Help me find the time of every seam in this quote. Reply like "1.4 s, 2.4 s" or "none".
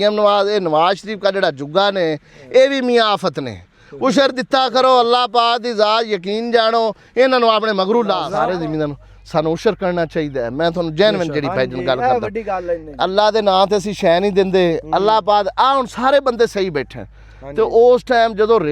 8.3 s